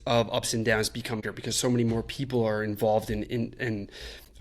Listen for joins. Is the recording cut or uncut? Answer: cut